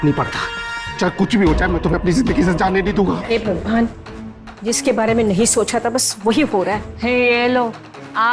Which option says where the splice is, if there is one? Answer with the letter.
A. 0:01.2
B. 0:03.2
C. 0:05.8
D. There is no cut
B